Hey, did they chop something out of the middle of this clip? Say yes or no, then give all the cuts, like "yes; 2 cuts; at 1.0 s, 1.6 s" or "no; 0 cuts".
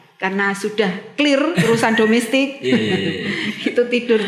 no; 0 cuts